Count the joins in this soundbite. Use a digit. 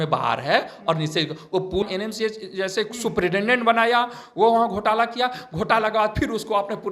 1